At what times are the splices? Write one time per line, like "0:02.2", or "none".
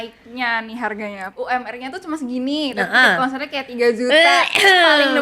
0:01.2